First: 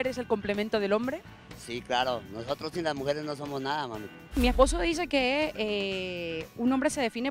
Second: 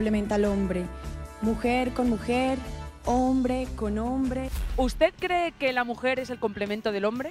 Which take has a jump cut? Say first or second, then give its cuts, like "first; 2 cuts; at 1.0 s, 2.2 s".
second; 1 cut; at 4.6 s